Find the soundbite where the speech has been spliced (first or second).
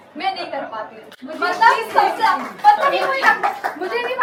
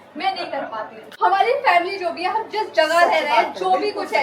second